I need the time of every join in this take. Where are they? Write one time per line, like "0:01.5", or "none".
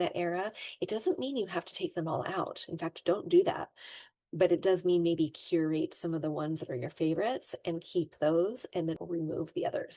0:09.0